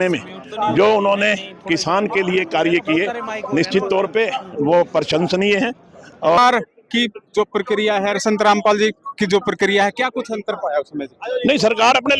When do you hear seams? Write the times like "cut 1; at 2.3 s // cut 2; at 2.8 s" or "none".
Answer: cut 1; at 6.4 s